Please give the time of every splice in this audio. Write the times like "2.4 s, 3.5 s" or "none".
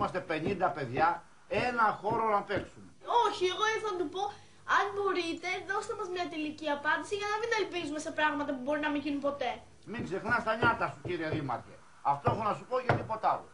8.7 s